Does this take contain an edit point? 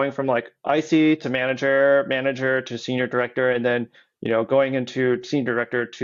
no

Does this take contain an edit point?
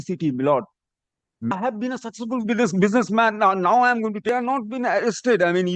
yes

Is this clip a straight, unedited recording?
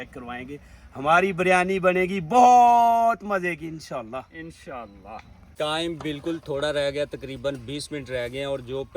no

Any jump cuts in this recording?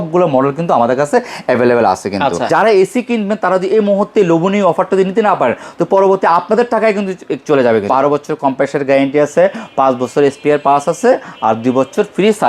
yes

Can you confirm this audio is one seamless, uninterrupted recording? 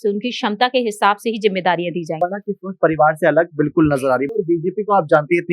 no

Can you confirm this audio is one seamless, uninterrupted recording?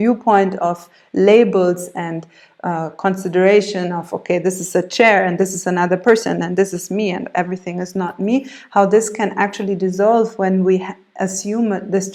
yes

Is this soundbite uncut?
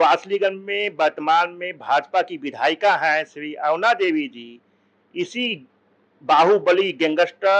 yes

